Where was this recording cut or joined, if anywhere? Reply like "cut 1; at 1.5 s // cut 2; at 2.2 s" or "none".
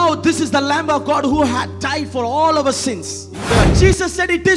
cut 1; at 3.6 s